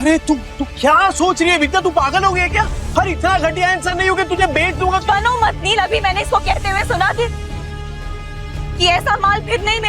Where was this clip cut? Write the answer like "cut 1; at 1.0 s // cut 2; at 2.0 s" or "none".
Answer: cut 1; at 2.8 s